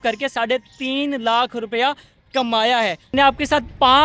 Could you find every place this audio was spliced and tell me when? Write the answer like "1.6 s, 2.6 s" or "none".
3.1 s